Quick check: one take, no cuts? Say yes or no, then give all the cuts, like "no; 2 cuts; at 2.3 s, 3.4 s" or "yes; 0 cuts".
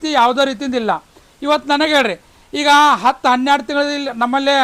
yes; 0 cuts